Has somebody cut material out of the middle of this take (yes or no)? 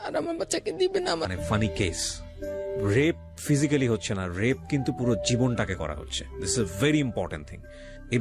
yes